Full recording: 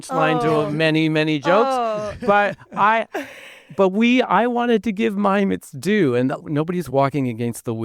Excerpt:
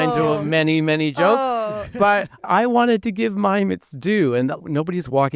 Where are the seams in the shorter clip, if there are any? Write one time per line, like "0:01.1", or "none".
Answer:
0:02.5